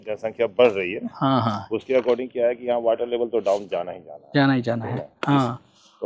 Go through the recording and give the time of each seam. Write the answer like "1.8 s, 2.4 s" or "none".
none

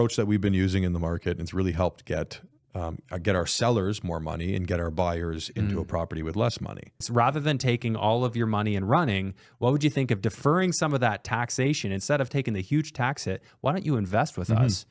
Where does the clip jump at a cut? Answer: 7.1 s

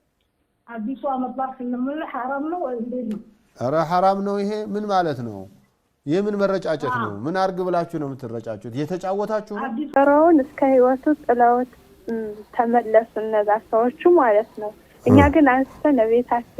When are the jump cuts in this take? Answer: 10.0 s

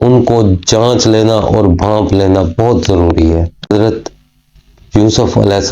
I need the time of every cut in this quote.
3.7 s

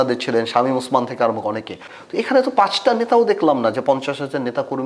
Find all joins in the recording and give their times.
1.8 s

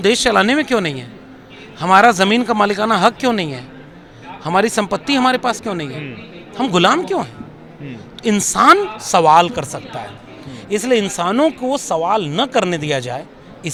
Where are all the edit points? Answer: none

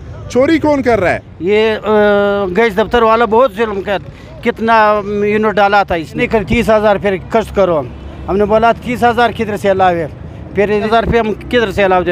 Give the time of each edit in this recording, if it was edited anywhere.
1.3 s, 6.2 s, 10.9 s

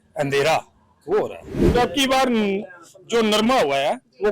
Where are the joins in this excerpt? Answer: 1.6 s

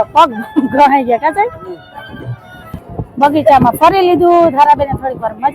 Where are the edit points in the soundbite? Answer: 2.8 s

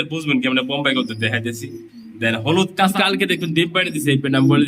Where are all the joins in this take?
2.9 s

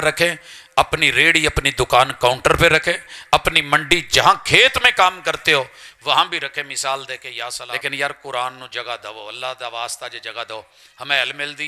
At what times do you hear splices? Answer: 7.6 s

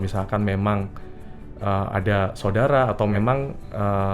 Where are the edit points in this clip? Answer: 3.2 s

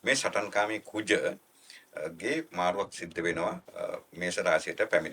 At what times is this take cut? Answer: 3.7 s

